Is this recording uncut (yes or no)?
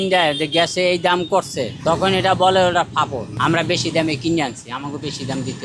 no